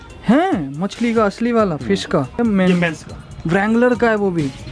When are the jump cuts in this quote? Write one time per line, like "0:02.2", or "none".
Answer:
0:02.4